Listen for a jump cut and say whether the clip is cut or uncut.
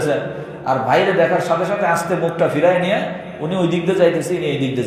uncut